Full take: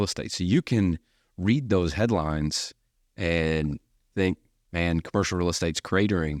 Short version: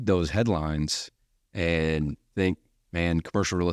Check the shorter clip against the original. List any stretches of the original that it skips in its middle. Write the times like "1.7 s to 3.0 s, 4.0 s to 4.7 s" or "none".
3.8 s to 4.0 s